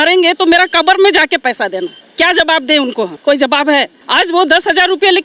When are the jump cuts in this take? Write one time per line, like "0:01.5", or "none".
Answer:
0:02.0
0:03.1
0:04.0